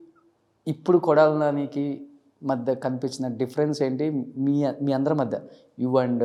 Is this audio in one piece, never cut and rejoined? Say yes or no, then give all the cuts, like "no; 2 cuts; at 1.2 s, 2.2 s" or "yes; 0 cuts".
yes; 0 cuts